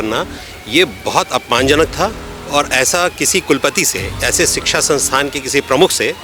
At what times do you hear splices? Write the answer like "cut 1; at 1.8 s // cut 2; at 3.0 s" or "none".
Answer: none